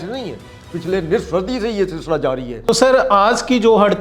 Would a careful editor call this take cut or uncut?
uncut